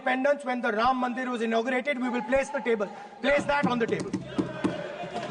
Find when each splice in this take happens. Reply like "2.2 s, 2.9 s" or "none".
none